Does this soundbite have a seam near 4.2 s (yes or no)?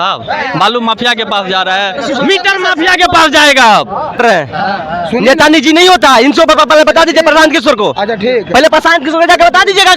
yes